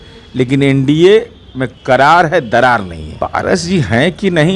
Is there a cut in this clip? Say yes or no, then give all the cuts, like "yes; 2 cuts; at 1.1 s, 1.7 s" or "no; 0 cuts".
yes; 1 cut; at 3.1 s